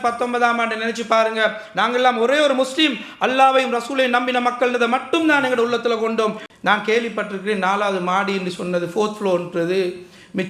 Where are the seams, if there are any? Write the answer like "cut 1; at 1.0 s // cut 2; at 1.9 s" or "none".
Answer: cut 1; at 6.5 s